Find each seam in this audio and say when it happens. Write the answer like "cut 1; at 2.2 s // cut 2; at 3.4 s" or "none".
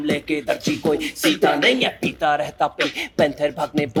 none

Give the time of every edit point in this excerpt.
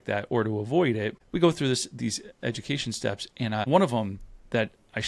cut 1; at 1.2 s // cut 2; at 3.6 s

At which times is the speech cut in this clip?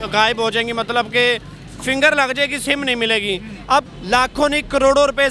cut 1; at 3.9 s

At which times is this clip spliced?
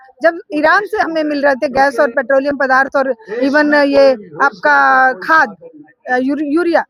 none

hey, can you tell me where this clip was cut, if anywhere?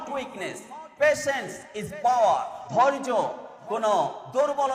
cut 1; at 2.6 s

